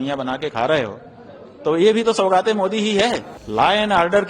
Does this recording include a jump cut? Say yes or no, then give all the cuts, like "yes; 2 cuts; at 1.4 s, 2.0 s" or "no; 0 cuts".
yes; 1 cut; at 3.3 s